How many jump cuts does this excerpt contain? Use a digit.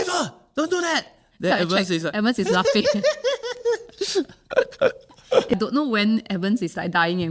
1